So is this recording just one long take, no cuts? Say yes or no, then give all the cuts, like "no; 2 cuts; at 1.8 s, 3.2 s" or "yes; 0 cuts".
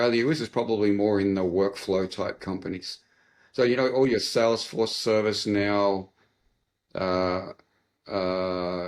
yes; 0 cuts